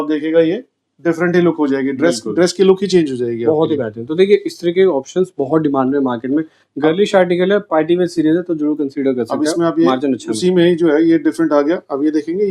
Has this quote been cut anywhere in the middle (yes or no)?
no